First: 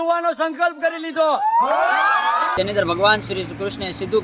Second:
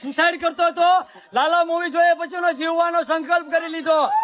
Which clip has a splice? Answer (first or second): first